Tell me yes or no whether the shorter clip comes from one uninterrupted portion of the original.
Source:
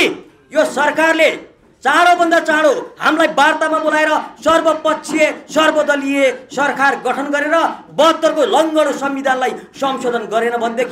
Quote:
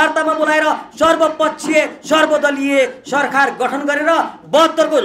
yes